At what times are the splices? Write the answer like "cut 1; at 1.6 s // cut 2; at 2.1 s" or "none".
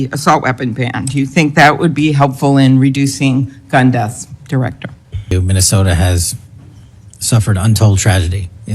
cut 1; at 5.3 s